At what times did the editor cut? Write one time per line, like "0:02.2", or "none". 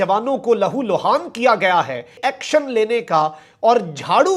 0:02.2